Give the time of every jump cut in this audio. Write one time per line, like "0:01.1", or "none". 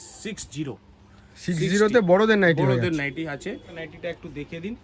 0:03.8